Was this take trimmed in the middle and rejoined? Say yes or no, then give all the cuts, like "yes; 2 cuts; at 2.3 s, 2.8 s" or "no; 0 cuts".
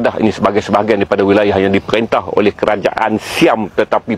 no; 0 cuts